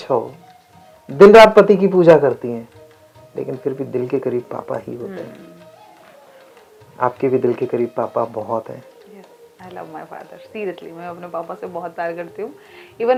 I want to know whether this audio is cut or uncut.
uncut